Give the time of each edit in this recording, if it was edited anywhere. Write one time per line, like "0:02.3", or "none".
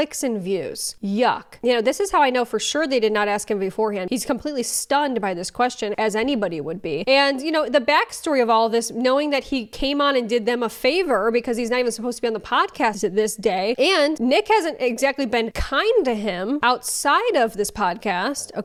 none